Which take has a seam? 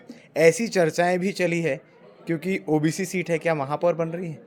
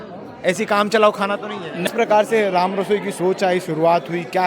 second; 1 cut; at 1.9 s

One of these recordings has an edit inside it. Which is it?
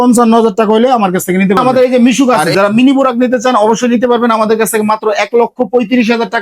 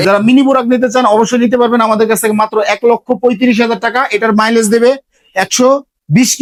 first; 1 cut; at 1.6 s

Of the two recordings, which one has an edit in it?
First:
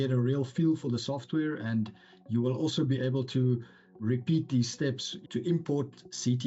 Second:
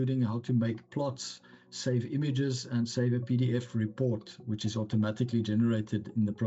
first; 2 cuts; at 4.0 s, 5.1 s

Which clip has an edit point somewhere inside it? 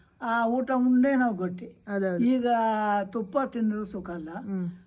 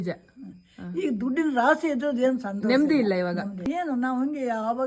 second; 1 cut; at 3.6 s

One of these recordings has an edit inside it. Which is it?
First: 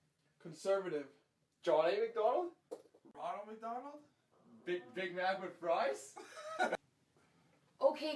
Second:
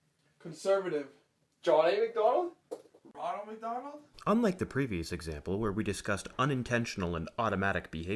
first; 2 cuts; at 4.1 s, 6.0 s

